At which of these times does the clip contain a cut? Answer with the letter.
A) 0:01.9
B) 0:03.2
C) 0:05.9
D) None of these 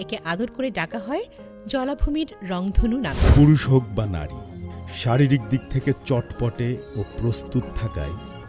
B